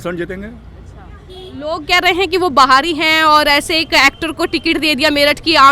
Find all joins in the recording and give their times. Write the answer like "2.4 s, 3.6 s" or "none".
none